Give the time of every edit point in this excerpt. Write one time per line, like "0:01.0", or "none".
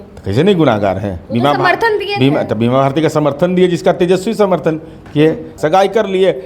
0:05.5